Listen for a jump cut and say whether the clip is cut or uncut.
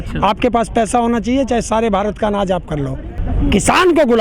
cut